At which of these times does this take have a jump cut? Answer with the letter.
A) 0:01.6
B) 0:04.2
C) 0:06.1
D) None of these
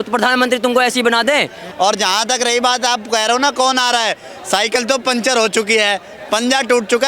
A